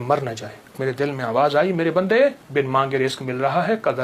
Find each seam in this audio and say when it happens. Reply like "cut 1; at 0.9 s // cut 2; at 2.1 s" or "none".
cut 1; at 0.8 s // cut 2; at 2.4 s